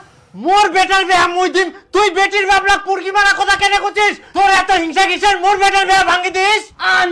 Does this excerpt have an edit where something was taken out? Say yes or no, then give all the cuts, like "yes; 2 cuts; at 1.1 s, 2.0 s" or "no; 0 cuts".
no; 0 cuts